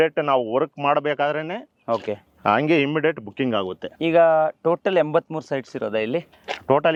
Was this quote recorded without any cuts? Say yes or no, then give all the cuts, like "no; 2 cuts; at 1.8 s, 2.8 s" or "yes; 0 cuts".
yes; 0 cuts